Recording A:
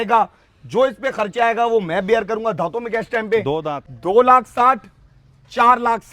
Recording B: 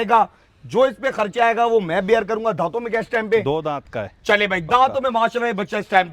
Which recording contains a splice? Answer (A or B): A